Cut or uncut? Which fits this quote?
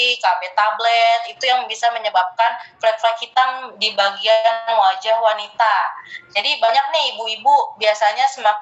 uncut